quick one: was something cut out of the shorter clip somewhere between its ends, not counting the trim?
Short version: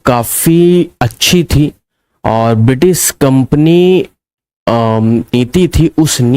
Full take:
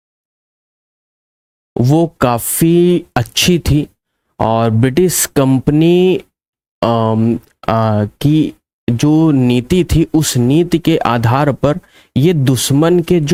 yes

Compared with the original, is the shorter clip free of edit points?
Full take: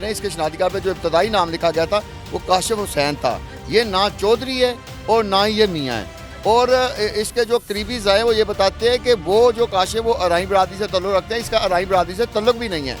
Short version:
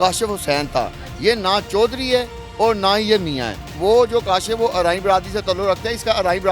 no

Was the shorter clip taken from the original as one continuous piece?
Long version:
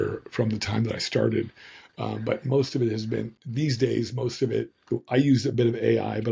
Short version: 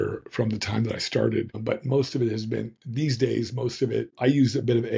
no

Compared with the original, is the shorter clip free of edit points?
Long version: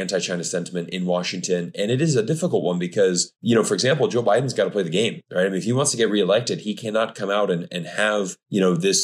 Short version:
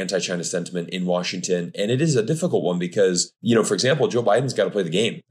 yes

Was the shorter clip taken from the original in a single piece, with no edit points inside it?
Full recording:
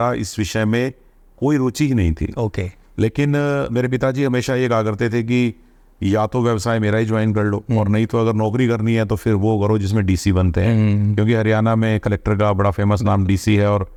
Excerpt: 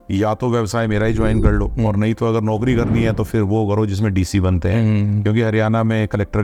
yes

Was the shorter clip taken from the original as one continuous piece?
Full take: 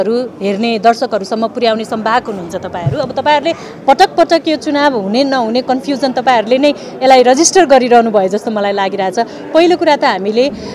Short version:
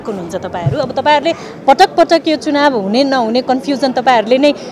yes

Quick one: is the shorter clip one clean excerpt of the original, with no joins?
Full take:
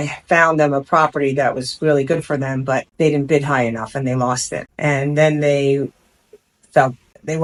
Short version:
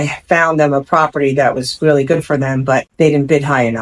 yes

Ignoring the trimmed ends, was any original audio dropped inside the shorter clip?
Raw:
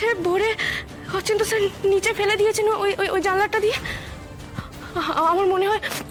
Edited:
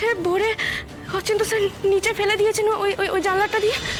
no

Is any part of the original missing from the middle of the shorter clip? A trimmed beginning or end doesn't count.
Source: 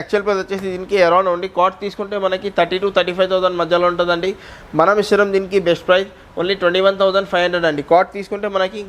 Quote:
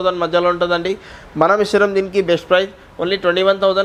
no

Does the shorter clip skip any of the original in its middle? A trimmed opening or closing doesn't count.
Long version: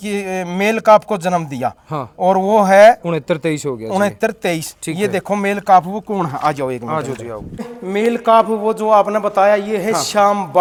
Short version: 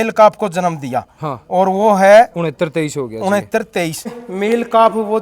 yes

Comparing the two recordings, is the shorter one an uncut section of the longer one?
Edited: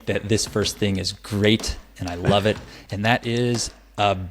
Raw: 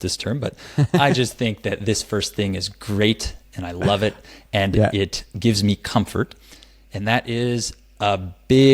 no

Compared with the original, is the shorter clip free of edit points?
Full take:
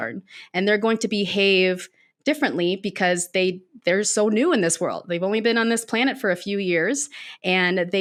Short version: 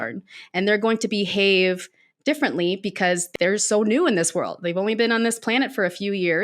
no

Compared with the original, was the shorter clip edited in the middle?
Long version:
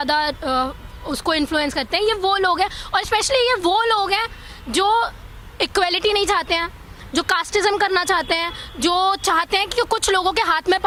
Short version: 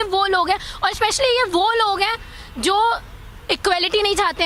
no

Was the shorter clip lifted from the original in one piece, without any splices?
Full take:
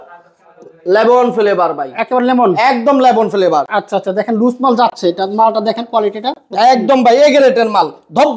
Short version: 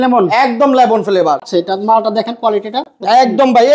no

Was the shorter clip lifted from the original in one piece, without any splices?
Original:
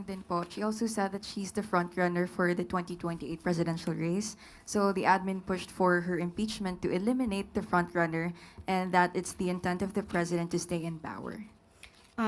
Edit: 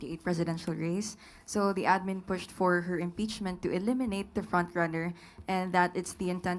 yes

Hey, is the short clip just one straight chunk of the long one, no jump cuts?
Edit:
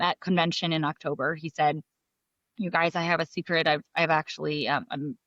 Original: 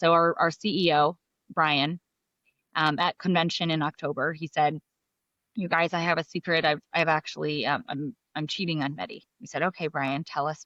yes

